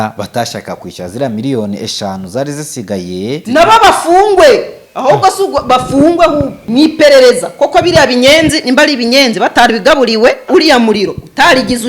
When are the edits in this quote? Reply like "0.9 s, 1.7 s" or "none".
3.4 s, 6.6 s, 10.5 s